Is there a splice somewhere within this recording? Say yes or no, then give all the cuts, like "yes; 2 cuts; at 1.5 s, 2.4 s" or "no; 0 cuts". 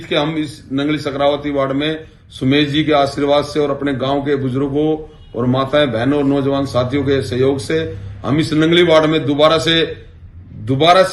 no; 0 cuts